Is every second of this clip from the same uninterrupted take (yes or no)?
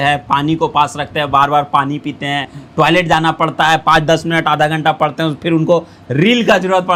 yes